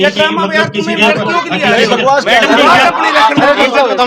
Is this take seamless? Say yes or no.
yes